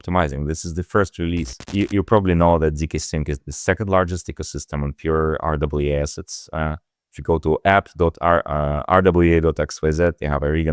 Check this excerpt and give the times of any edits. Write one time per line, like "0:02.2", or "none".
0:01.7

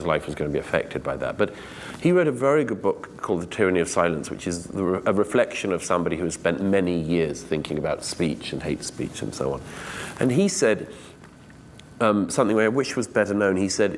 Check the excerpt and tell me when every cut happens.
0:01.3

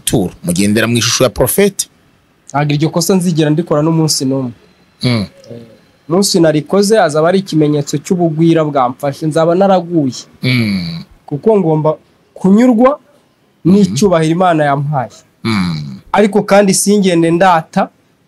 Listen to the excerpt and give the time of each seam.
none

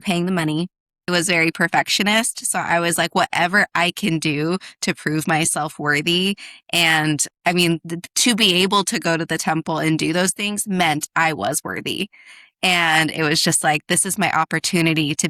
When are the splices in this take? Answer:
0:01.1

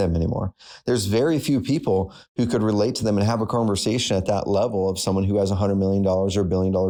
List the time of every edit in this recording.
none

